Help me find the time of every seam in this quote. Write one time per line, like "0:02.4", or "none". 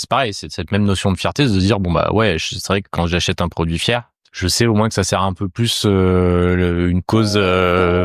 0:04.2